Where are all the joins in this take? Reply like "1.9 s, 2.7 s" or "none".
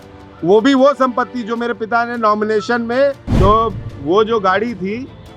3.3 s

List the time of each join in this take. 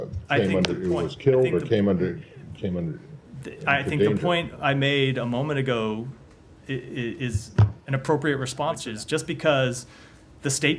8.9 s

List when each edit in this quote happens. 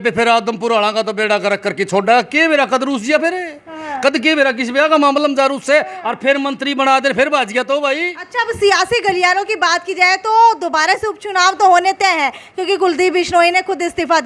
none

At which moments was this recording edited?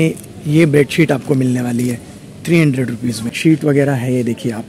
3.4 s

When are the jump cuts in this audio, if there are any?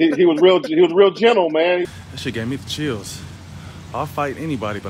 1.9 s

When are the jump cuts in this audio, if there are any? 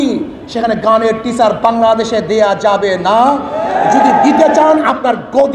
none

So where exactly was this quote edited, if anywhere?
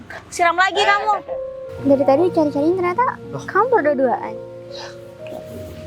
1.6 s

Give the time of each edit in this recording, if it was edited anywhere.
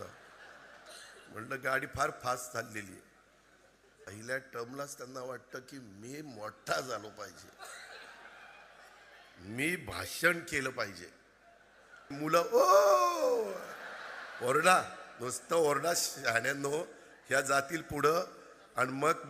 4.2 s, 12.1 s

